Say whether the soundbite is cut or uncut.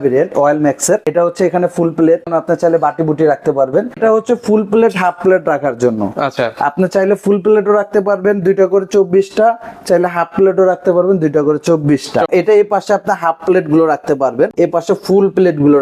cut